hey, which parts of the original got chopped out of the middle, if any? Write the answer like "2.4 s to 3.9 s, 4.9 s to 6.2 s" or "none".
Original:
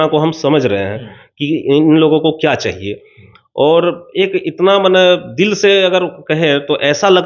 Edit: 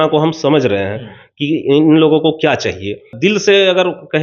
3.1 s to 5.3 s